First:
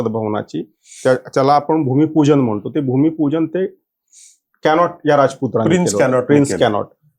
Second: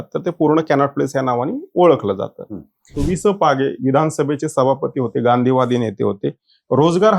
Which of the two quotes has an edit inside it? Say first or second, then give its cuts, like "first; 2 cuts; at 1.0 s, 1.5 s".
second; 1 cut; at 3.0 s